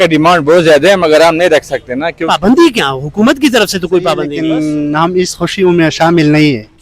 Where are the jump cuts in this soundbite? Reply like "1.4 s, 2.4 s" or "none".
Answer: 4.3 s